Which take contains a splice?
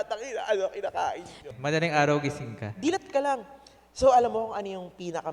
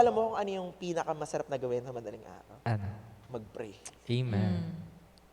first; 1 cut; at 1.3 s

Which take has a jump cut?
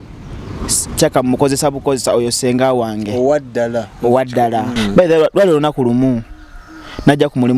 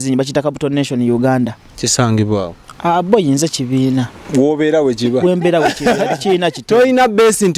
first; 1 cut; at 4.7 s

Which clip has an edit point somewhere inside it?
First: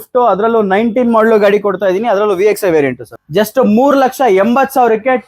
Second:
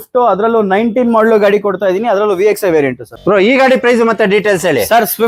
first; 1 cut; at 3.1 s

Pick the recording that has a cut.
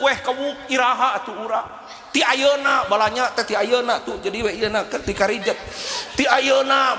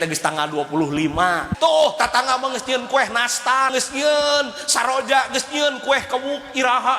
second; 2 cuts; at 1.5 s, 3.7 s

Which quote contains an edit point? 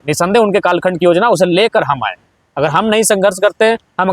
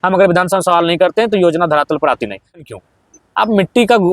second; 1 cut; at 2.6 s

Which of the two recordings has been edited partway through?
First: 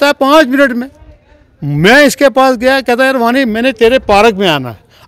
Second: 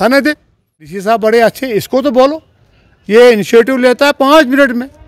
second; 1 cut; at 0.9 s

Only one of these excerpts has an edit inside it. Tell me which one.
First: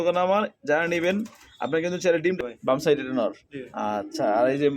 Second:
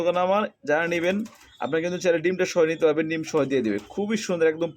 first; 1 cut; at 2.4 s

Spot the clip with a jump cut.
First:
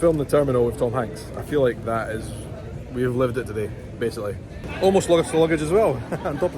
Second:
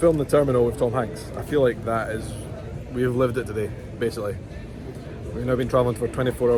first; 1 cut; at 4.6 s

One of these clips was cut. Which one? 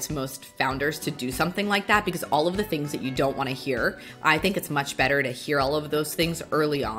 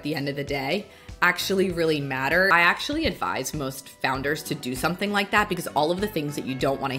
second; 1 cut; at 2.5 s

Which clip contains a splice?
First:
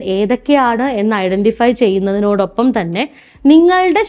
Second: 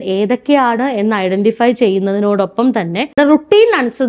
second; 1 cut; at 3.2 s

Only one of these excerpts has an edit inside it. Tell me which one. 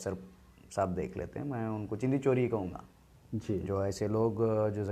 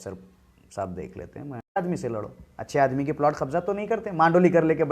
second; 1 cut; at 1.8 s

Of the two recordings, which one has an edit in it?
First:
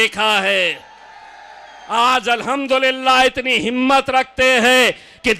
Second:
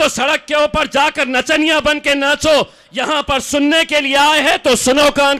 first; 1 cut; at 1.7 s

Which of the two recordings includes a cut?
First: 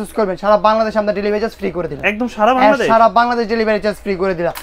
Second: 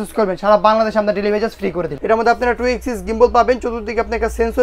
second; 1 cut; at 1.9 s

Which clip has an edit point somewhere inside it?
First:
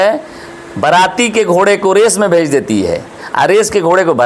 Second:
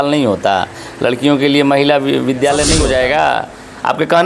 second; 1 cut; at 2.8 s

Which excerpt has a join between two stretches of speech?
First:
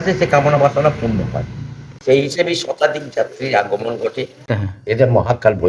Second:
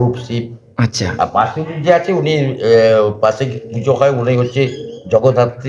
first; 1 cut; at 4.6 s

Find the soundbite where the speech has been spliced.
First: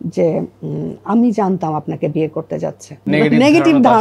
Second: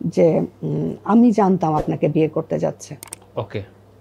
first; 1 cut; at 3.1 s

